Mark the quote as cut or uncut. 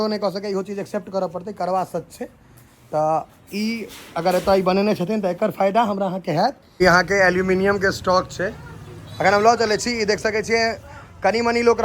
cut